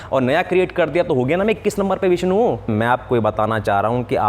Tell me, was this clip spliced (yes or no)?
yes